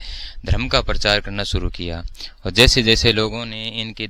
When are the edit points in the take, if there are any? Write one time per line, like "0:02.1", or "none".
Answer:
none